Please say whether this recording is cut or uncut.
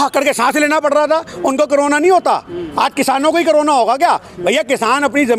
uncut